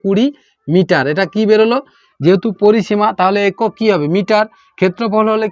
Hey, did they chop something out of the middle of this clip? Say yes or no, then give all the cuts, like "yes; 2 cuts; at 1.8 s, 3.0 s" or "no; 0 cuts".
no; 0 cuts